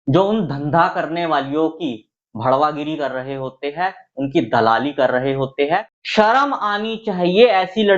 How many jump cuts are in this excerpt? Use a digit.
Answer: 1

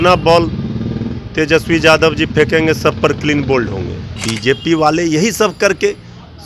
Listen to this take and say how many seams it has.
1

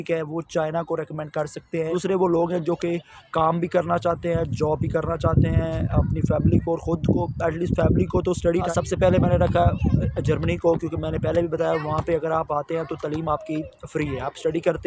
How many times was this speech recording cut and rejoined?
2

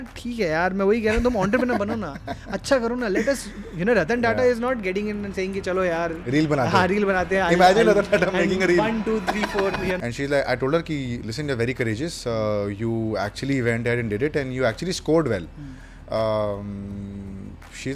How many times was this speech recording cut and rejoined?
1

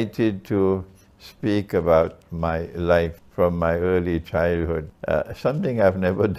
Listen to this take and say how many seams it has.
2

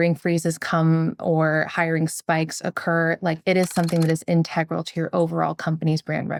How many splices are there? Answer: 0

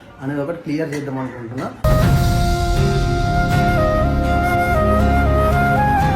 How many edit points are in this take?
0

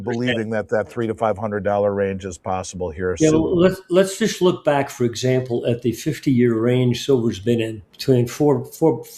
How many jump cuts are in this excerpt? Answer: 1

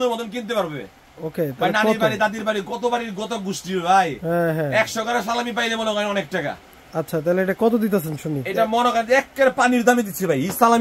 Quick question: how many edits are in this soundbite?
0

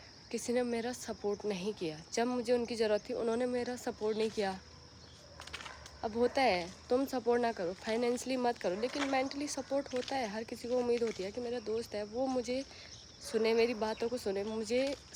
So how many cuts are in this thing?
0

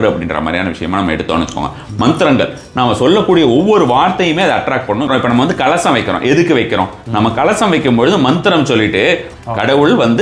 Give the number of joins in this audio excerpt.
2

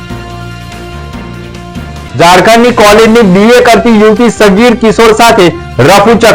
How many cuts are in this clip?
1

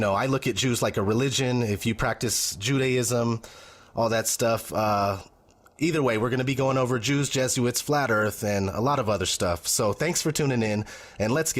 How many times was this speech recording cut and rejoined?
1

